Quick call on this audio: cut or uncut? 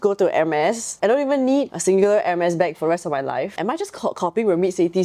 cut